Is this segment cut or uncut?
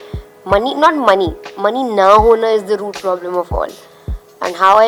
uncut